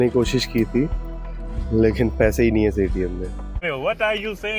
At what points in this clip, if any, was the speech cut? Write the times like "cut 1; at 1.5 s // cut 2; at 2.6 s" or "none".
cut 1; at 3.6 s